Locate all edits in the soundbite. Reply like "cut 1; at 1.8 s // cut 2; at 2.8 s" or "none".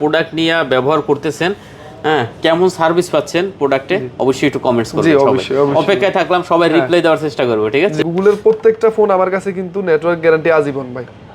cut 1; at 8.0 s